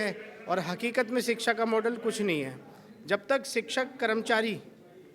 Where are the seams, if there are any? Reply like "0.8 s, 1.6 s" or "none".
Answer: none